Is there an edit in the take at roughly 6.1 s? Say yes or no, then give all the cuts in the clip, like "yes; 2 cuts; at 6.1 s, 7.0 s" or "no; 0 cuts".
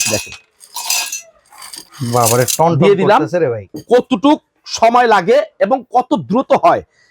no; 2 cuts; at 1.8 s, 3.7 s